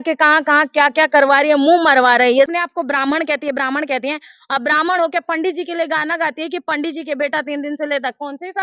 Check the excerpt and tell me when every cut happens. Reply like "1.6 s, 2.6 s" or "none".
2.5 s